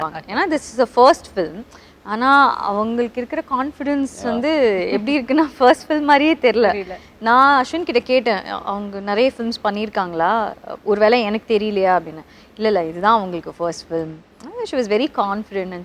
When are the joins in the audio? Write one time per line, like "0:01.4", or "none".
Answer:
none